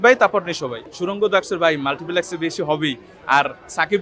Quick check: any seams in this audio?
no; 0 cuts

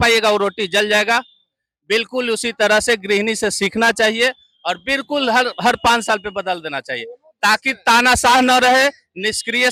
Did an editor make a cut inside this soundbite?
no; 0 cuts

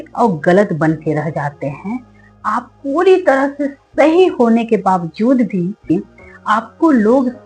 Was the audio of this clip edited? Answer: yes; 1 cut; at 5.8 s

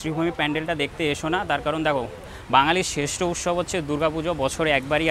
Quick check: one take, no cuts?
yes; 0 cuts

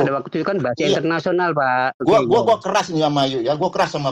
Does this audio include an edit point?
yes; 1 cut; at 2.0 s

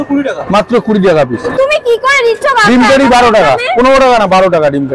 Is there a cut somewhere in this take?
no; 0 cuts

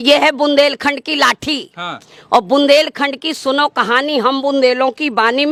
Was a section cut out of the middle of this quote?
no; 0 cuts

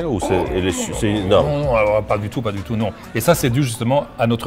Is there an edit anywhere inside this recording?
no; 0 cuts

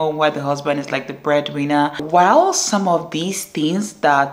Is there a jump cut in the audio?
yes; 1 cut; at 2.0 s

